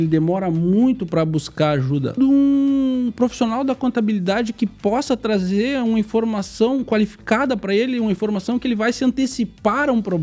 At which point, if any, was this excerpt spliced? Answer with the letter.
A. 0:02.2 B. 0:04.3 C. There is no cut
A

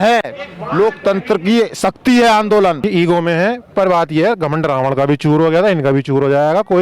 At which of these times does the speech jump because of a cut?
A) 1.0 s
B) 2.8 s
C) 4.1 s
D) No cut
B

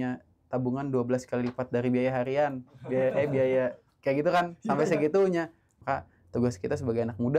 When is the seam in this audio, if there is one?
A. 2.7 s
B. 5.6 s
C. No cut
B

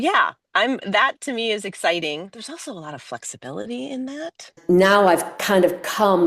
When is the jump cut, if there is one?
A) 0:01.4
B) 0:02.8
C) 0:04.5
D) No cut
C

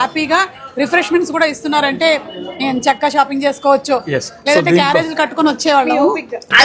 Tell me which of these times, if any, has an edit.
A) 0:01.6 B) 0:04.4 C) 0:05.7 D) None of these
D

